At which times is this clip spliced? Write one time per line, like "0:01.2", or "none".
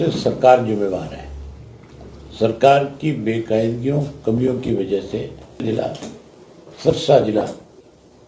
0:05.6